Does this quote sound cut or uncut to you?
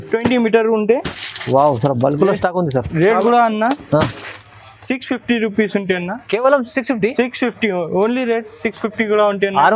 cut